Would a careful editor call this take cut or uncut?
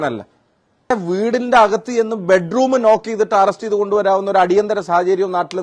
cut